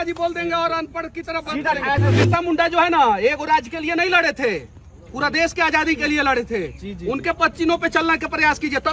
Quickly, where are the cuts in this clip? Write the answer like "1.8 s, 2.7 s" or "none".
2.1 s